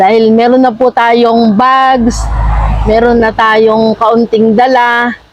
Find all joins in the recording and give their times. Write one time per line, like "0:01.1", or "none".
none

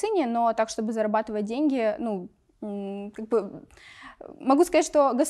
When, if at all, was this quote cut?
none

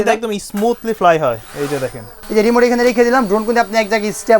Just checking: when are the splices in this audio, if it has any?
0:02.1

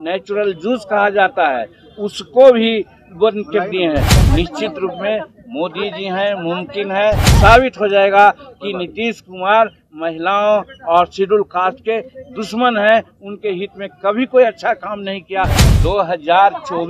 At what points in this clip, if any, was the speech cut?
0:04.1
0:07.3
0:15.6

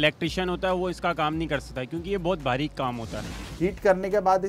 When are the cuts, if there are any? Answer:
0:03.3

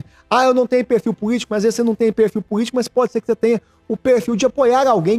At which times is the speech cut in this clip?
none

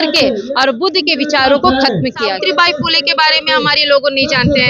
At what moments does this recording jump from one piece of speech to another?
0:02.3

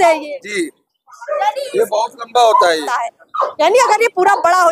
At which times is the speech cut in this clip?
0:02.9

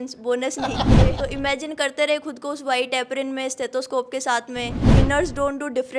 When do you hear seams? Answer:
0:01.1
0:04.9

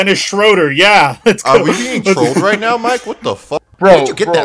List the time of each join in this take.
0:03.4

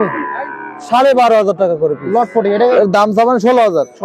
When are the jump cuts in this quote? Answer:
0:02.8

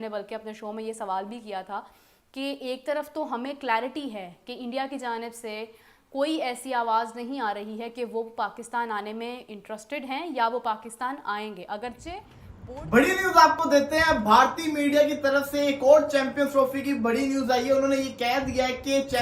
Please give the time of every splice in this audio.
0:12.5

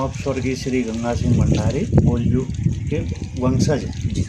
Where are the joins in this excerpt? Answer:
0:01.9

